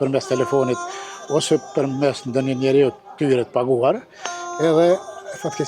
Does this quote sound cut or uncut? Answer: uncut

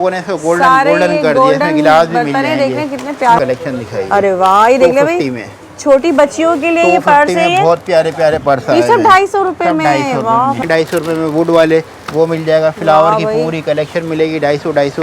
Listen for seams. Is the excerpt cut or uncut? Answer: cut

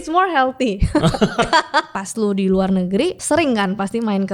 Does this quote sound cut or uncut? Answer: cut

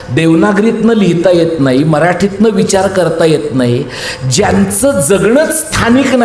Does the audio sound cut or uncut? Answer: uncut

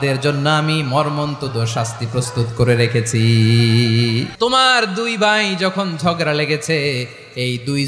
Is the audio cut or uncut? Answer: cut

